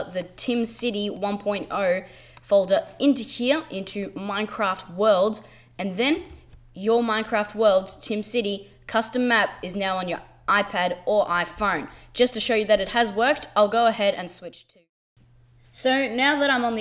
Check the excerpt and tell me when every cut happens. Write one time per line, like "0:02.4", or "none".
0:08.9